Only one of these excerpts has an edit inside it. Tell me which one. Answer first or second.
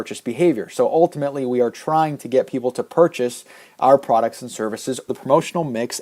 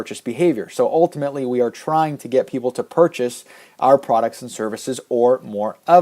second